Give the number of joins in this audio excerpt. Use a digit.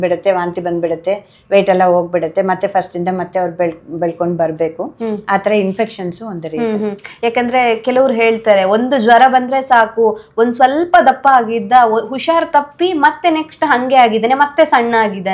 0